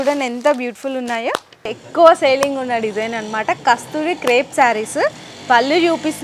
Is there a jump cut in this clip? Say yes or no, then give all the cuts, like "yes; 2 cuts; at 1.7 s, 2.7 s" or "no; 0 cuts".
yes; 1 cut; at 1.8 s